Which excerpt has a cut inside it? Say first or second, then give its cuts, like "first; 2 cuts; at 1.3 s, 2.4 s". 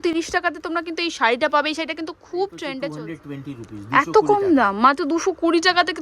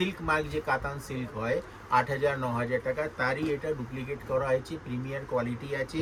first; 1 cut; at 2.9 s